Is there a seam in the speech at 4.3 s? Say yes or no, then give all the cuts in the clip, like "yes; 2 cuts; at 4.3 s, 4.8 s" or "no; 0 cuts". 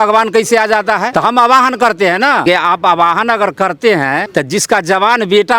yes; 3 cuts; at 1.1 s, 2.4 s, 4.3 s